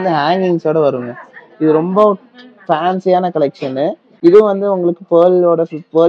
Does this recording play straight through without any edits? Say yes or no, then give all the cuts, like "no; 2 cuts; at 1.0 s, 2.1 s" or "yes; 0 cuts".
yes; 0 cuts